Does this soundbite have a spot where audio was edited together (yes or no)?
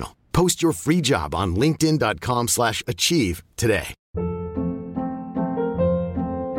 yes